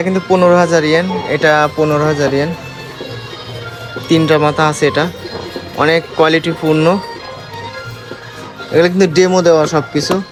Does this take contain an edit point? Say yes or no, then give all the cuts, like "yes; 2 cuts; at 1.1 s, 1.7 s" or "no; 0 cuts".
no; 0 cuts